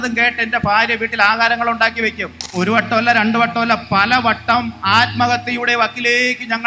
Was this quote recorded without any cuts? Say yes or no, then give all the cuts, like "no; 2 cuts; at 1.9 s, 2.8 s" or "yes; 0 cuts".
no; 1 cut; at 2.5 s